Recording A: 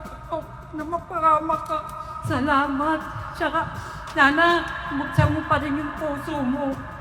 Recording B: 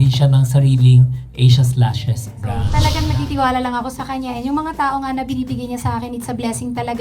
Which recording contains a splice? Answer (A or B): B